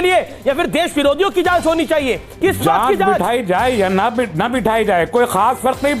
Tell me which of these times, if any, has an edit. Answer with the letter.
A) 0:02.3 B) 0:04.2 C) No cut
A